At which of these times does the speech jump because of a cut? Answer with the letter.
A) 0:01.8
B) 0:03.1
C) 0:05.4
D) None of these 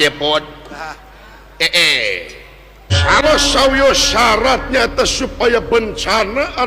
B